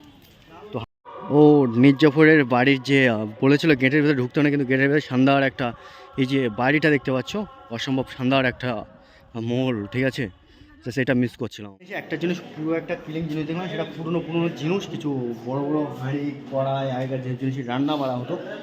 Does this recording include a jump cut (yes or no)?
yes